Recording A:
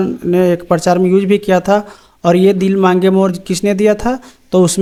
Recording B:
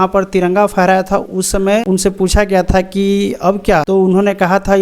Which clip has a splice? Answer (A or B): B